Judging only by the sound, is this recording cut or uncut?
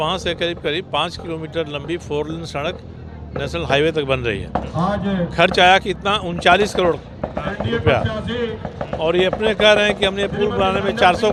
uncut